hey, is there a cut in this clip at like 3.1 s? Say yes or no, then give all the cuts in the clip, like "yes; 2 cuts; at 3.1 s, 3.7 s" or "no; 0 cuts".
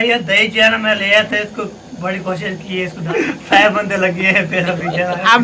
yes; 1 cut; at 3.1 s